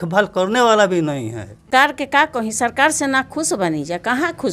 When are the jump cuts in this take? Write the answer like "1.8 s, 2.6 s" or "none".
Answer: 1.7 s